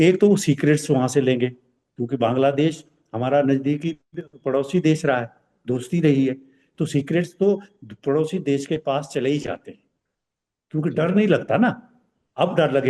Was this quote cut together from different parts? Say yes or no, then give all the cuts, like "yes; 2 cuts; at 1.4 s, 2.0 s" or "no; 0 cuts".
no; 0 cuts